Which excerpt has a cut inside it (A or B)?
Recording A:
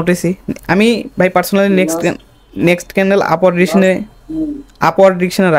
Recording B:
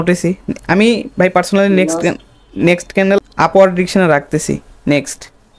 B